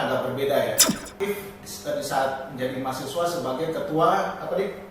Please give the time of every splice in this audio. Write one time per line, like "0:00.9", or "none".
0:01.1